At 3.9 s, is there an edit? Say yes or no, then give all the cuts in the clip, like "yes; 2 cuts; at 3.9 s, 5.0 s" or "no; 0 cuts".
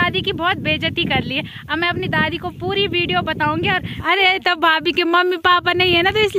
yes; 1 cut; at 3.9 s